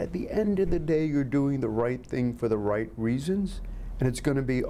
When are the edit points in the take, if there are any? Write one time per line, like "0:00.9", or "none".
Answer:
none